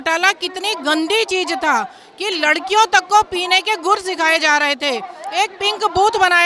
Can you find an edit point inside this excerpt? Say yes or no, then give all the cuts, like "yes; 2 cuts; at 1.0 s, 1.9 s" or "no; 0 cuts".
no; 0 cuts